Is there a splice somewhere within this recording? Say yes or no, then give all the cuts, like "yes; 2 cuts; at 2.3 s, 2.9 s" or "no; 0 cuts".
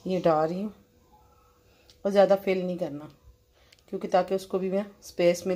no; 0 cuts